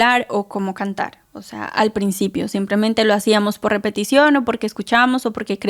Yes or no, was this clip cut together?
no